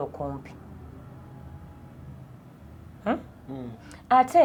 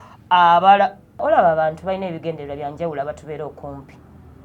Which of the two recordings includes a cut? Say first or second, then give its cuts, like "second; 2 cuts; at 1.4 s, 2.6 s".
second; 1 cut; at 1.2 s